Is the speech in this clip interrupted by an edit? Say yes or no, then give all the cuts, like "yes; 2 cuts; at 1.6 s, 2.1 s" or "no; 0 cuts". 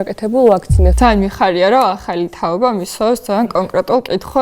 yes; 1 cut; at 0.9 s